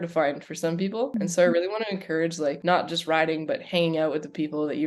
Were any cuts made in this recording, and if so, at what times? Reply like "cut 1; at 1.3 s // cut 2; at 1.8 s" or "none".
cut 1; at 1.1 s // cut 2; at 2.6 s